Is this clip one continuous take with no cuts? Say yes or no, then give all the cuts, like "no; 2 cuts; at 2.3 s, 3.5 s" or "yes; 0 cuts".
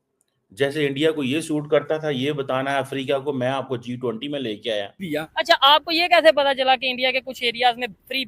no; 1 cut; at 5.0 s